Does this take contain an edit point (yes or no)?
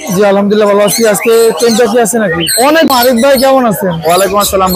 yes